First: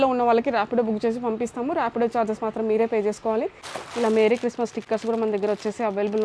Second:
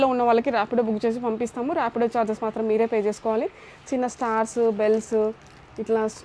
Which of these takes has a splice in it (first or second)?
first